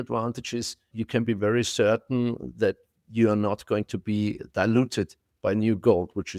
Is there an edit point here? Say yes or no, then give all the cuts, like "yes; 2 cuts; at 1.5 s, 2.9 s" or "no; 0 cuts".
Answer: yes; 1 cut; at 0.9 s